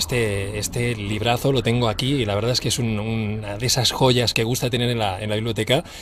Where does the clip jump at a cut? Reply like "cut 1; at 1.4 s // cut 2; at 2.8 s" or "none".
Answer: cut 1; at 2.0 s